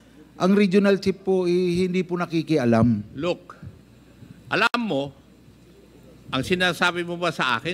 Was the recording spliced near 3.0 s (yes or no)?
no